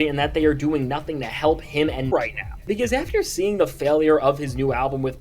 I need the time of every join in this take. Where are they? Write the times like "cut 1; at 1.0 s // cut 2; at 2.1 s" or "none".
cut 1; at 2.1 s